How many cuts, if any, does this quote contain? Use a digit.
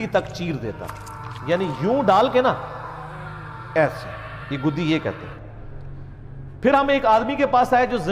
1